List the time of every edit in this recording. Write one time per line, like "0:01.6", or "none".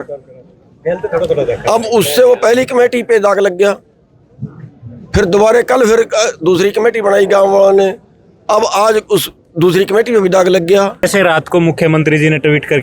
0:11.0